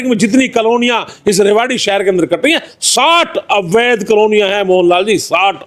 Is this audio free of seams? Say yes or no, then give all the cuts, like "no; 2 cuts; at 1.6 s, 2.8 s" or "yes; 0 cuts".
yes; 0 cuts